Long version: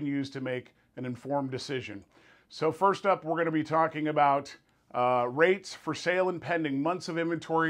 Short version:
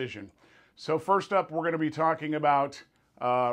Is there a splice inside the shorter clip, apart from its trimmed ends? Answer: no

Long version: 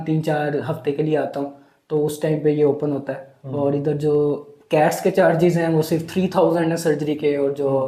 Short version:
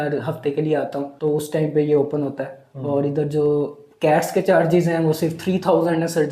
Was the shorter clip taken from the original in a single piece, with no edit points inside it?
no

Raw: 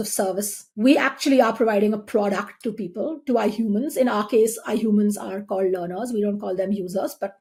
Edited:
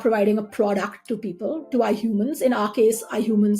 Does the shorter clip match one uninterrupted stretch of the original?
yes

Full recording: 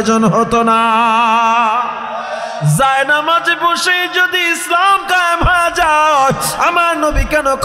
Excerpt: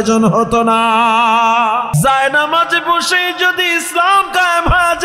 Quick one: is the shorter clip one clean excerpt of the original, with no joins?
no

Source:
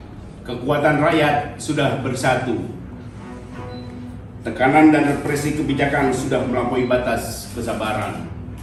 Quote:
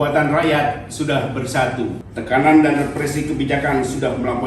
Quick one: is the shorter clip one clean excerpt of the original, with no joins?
no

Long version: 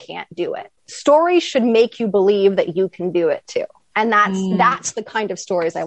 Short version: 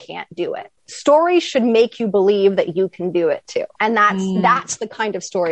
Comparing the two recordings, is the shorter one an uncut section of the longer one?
no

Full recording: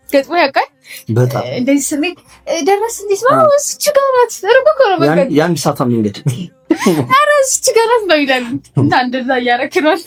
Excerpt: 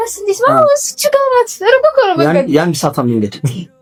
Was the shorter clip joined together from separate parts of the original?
no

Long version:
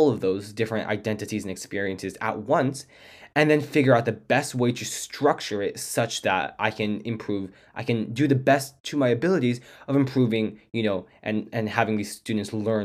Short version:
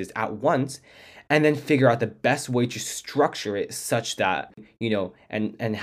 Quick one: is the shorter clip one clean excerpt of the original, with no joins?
no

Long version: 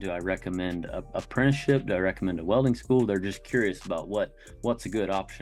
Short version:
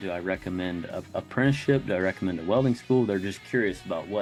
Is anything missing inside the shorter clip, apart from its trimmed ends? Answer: no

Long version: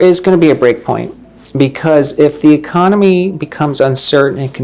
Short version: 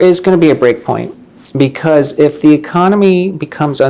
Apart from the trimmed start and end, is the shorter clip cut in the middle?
no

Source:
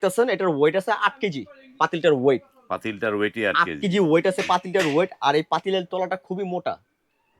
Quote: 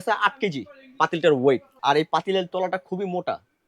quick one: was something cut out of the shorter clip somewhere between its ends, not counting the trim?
yes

